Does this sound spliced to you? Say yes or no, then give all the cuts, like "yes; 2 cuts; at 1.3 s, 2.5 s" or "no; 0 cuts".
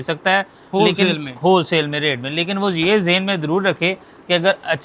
no; 0 cuts